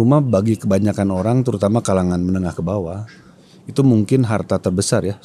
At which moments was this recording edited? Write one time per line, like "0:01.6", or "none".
none